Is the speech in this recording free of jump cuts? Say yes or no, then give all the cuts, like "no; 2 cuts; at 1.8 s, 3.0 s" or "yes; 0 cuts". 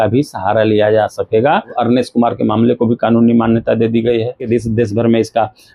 no; 2 cuts; at 1.7 s, 4.4 s